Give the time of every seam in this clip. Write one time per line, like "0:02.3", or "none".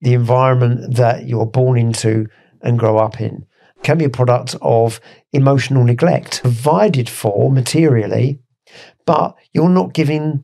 0:03.8
0:06.5